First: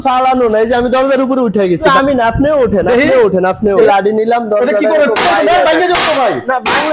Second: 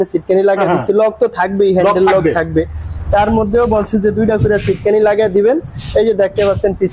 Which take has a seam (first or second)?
first